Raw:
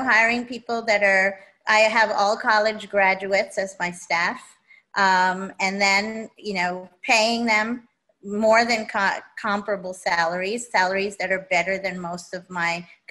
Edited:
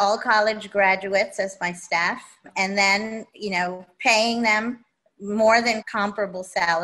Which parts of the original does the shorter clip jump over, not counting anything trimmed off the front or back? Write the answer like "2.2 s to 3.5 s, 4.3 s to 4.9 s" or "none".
4.6 s to 5.5 s, 8.9 s to 9.3 s